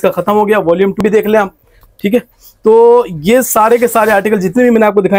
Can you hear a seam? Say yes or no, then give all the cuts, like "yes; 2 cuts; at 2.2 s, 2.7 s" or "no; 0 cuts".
yes; 1 cut; at 1.0 s